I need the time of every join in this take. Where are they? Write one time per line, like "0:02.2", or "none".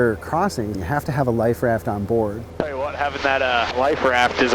0:02.4